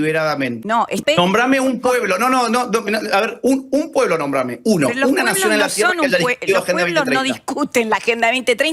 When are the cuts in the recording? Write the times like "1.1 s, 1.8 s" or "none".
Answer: 1.0 s